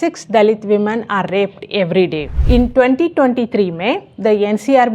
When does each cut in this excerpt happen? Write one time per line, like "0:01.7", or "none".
0:02.3